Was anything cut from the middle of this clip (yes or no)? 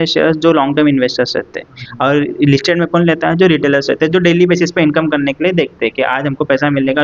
no